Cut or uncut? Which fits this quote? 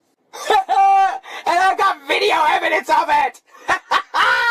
uncut